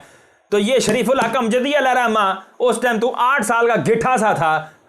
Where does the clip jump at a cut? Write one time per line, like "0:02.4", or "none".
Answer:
none